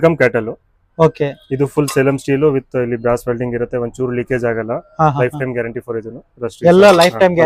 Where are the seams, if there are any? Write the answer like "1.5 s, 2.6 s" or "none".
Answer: none